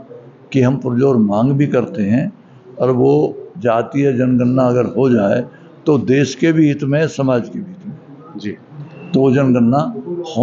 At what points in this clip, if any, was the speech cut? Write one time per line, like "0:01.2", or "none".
none